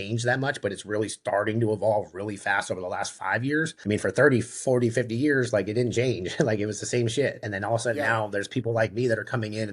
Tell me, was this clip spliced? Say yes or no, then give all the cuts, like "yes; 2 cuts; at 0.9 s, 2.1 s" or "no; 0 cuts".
yes; 1 cut; at 3.8 s